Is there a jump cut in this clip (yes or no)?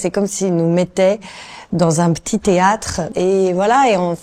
yes